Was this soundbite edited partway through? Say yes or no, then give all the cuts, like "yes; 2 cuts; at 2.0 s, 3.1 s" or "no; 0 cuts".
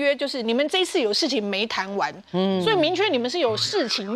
no; 0 cuts